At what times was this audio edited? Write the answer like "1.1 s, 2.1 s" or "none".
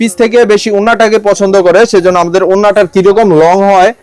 none